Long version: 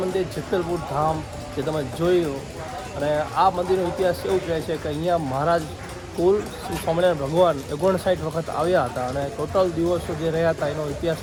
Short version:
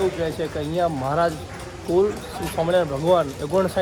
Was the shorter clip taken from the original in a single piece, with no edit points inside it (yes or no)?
yes